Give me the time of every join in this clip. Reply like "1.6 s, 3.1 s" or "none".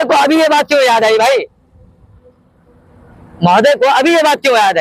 none